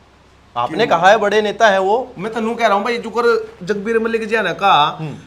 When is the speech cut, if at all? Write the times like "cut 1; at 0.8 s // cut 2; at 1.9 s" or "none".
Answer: none